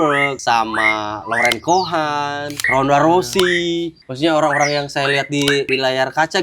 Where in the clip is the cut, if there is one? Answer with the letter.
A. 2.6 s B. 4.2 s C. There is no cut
A